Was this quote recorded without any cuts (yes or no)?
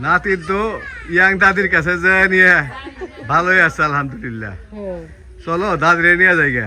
yes